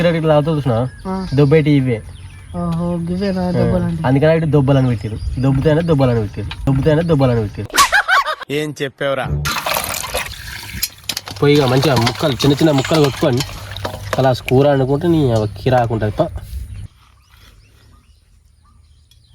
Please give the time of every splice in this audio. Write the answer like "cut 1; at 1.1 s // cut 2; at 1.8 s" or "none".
cut 1; at 10.4 s // cut 2; at 17.0 s